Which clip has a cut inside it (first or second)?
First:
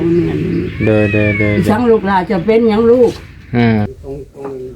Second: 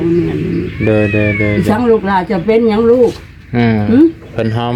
first